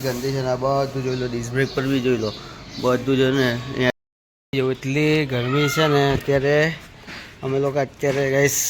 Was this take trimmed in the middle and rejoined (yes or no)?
yes